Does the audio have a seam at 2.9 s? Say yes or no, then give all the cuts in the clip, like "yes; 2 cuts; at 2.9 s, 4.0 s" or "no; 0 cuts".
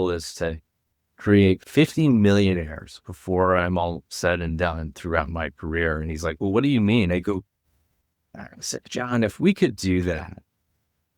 no; 1 cut; at 1.7 s